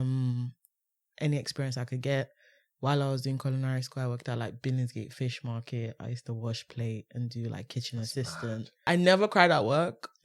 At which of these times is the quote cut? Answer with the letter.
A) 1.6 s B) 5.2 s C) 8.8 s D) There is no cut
C